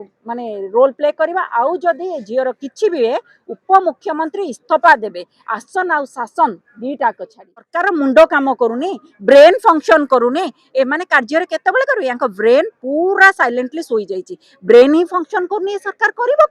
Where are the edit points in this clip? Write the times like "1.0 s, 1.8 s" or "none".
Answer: 7.7 s